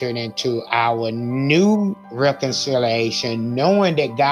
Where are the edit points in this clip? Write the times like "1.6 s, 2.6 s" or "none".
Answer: 2.0 s